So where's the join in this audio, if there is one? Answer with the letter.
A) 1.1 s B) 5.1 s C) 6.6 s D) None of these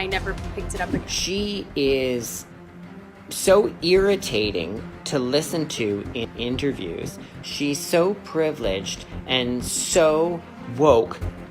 A